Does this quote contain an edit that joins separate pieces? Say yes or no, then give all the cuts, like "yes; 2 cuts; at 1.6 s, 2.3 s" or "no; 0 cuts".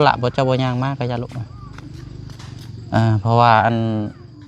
no; 0 cuts